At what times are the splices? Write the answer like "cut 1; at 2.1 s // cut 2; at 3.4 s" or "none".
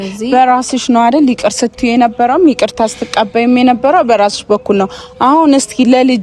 none